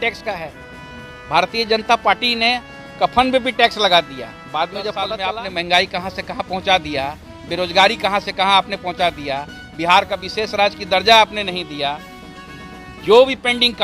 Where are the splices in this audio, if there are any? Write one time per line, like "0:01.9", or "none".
0:05.1